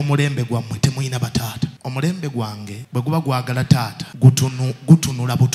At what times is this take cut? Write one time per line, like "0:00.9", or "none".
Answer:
0:01.8
0:02.7
0:04.0